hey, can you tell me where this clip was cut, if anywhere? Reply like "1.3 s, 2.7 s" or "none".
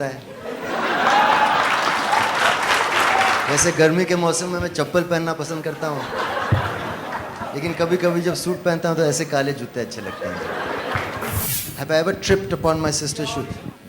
none